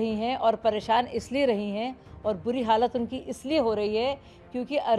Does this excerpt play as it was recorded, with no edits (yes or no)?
yes